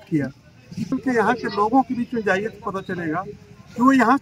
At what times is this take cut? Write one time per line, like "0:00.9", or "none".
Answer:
0:00.9